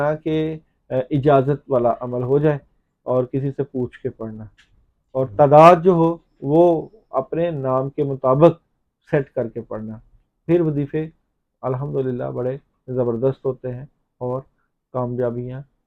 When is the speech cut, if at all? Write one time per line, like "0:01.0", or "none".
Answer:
none